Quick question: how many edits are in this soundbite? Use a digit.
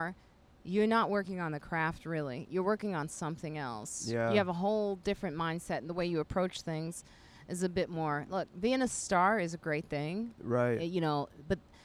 0